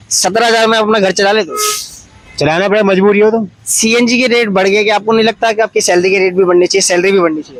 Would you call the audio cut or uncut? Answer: uncut